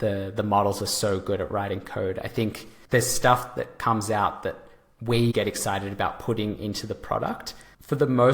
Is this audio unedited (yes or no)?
no